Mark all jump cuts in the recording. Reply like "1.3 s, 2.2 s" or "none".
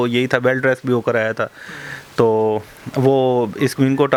none